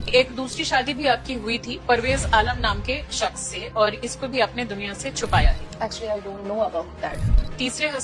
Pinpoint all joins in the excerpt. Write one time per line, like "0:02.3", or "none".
none